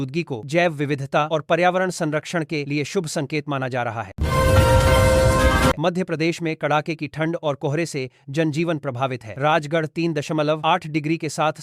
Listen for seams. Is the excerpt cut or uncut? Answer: cut